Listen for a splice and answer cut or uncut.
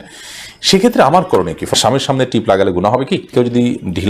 cut